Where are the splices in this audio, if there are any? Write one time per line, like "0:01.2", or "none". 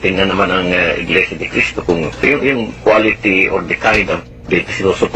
0:02.2